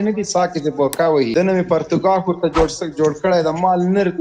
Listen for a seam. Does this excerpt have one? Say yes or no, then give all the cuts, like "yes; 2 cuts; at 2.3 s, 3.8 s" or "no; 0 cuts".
yes; 1 cut; at 1.3 s